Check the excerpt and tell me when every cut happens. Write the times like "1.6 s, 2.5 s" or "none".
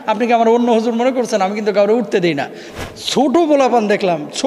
2.6 s